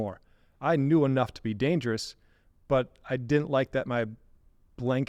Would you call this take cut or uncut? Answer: uncut